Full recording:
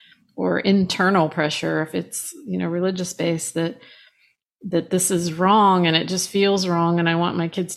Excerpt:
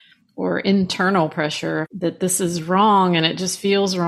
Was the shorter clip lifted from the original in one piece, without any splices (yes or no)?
no